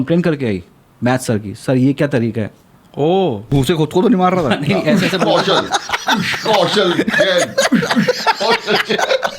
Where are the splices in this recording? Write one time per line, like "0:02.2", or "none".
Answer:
0:03.5